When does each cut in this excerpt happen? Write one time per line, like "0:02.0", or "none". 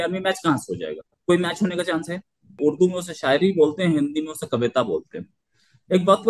0:02.6